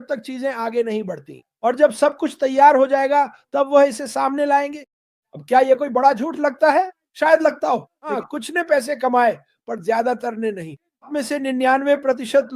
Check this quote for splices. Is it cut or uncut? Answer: cut